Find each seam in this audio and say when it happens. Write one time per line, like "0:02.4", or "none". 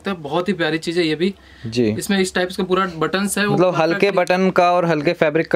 none